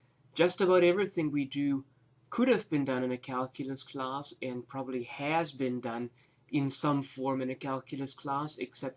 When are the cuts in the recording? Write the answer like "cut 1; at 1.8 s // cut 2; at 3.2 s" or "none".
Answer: none